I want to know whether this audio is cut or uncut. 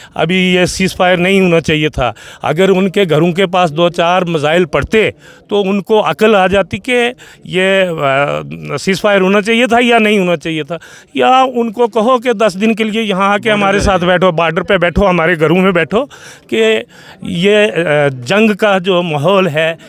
uncut